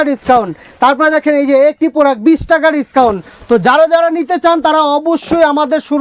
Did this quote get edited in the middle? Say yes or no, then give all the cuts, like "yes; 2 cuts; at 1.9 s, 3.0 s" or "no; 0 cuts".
no; 0 cuts